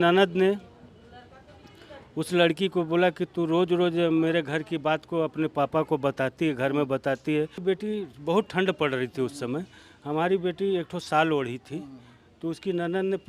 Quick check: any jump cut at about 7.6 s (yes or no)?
yes